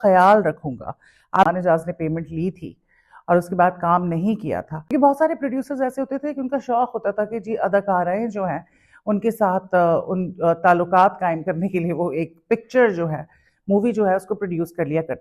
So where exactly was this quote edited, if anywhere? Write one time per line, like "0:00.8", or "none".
0:01.5
0:04.8